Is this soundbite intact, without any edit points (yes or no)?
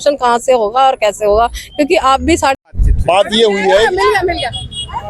no